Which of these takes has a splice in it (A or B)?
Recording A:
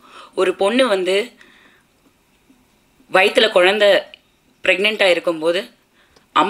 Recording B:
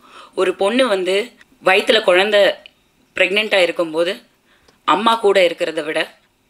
B